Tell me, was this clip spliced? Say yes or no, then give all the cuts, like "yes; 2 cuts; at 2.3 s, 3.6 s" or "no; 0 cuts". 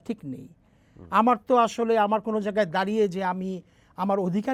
no; 0 cuts